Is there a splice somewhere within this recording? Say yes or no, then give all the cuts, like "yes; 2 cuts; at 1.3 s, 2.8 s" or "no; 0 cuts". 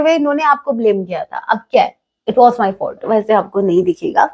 no; 0 cuts